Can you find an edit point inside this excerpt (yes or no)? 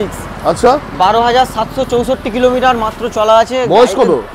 no